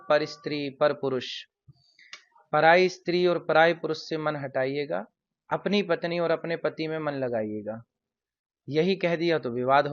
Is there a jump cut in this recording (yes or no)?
no